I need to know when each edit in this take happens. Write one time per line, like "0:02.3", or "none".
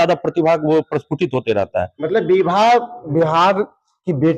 0:01.9